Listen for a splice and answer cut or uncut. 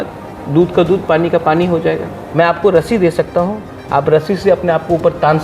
cut